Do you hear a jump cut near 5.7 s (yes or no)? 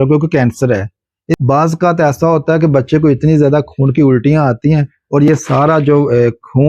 no